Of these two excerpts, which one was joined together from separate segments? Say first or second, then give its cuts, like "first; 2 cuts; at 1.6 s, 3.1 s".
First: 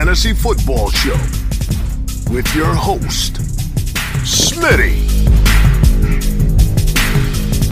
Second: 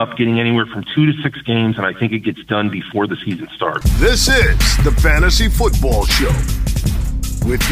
second; 1 cut; at 3.8 s